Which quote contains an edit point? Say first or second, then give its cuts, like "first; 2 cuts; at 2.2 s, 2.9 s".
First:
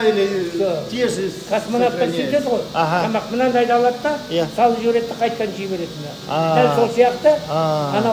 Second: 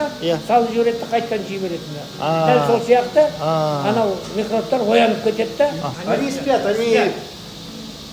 second; 1 cut; at 5.9 s